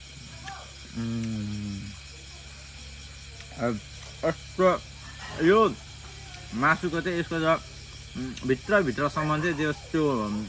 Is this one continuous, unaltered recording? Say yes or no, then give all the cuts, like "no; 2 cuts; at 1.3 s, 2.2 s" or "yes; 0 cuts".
yes; 0 cuts